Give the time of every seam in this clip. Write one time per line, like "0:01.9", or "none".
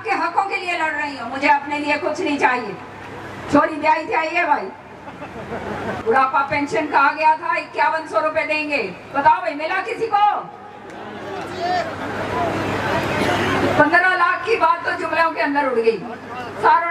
0:05.9